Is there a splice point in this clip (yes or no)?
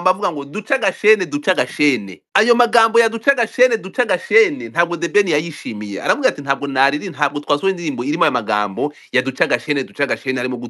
yes